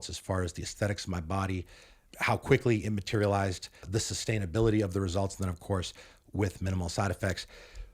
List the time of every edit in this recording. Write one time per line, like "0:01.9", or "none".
0:03.8